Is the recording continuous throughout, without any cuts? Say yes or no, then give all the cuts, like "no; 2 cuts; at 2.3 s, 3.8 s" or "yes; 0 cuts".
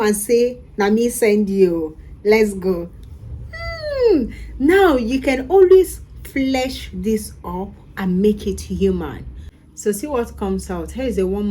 no; 1 cut; at 9.5 s